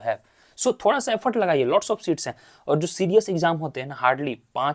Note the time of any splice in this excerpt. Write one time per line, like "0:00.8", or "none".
none